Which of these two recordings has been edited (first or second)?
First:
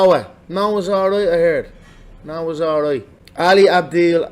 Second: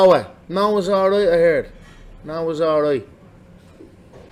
first